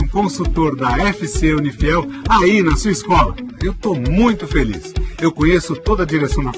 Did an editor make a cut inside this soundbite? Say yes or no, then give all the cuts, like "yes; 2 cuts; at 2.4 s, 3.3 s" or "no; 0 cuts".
no; 0 cuts